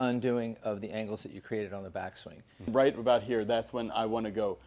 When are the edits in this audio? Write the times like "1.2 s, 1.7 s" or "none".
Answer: 2.7 s